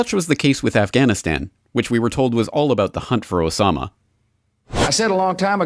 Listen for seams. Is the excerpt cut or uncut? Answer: uncut